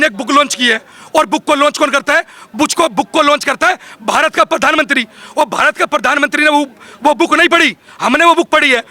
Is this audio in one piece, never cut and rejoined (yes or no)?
yes